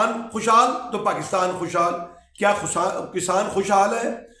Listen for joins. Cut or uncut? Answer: uncut